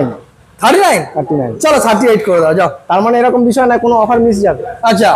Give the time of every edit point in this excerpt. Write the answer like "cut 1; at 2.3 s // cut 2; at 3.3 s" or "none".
none